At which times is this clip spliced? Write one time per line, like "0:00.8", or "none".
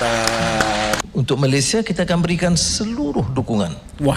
0:01.0